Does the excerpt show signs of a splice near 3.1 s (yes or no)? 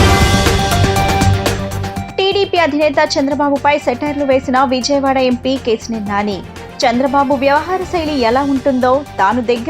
no